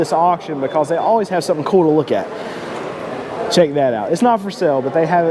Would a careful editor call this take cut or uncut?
uncut